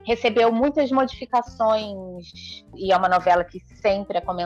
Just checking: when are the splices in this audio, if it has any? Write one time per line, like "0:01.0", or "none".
0:02.8